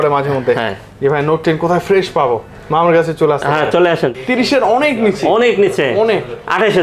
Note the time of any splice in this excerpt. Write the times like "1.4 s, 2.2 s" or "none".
4.1 s

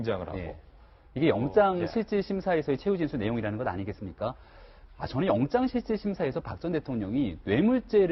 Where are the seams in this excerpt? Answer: 1.6 s

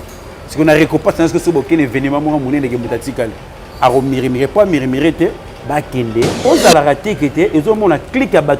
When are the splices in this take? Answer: 6.4 s

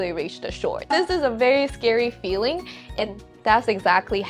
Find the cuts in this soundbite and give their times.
none

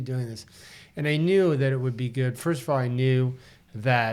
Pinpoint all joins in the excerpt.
none

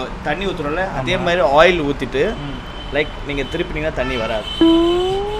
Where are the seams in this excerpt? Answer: 4.5 s

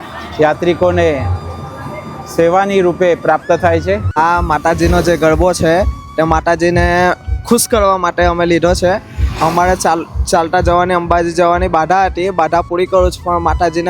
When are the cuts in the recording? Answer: 4.2 s

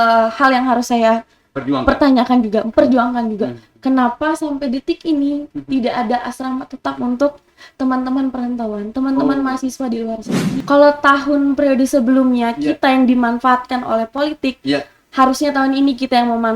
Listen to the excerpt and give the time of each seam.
10.5 s

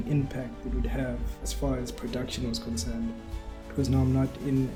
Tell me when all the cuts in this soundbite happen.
none

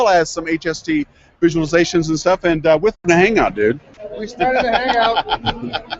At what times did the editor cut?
none

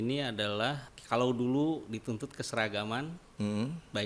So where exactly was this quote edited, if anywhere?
0.9 s

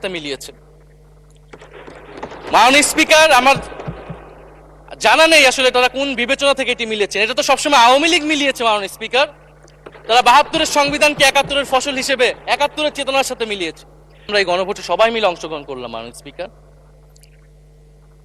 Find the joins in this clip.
14.3 s

